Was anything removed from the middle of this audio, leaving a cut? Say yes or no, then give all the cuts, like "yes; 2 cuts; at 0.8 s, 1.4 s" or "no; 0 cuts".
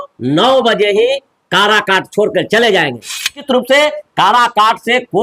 yes; 1 cut; at 3.4 s